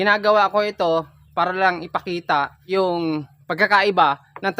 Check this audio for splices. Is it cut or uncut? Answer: cut